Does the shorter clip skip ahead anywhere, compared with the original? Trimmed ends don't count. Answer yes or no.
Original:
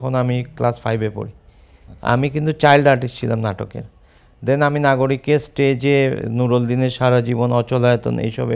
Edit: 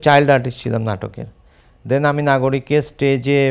no